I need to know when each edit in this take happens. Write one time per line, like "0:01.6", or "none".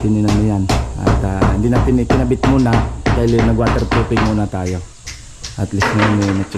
none